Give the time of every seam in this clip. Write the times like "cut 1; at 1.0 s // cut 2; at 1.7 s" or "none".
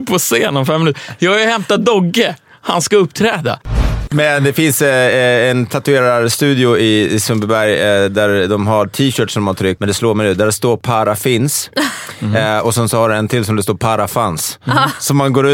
cut 1; at 3.9 s // cut 2; at 9.8 s // cut 3; at 10.8 s